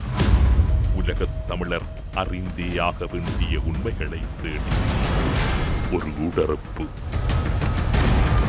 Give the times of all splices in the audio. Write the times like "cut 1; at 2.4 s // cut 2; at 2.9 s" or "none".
none